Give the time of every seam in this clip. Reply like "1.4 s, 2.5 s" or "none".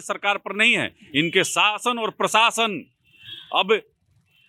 none